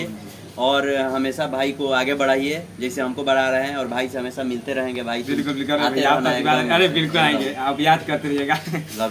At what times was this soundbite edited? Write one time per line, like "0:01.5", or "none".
none